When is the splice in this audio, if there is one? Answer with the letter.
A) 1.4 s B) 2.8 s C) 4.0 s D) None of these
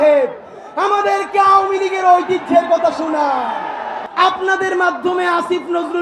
C